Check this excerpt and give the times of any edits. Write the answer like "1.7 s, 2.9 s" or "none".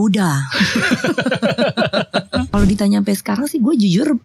2.5 s